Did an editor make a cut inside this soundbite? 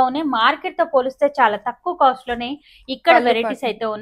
no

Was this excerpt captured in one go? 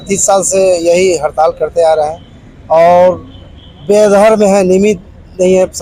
yes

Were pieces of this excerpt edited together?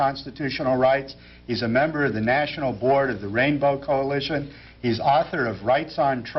no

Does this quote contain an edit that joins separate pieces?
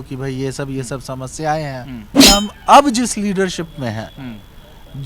yes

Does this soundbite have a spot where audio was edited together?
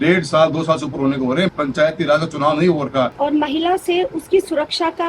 yes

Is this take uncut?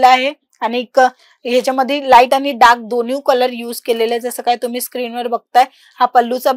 yes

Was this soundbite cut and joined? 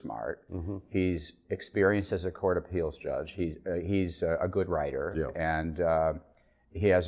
yes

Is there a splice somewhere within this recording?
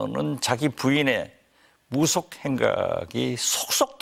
no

